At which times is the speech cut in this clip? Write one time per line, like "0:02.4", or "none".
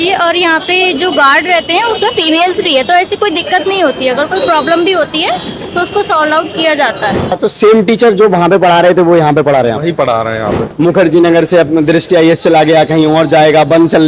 0:07.4
0:10.7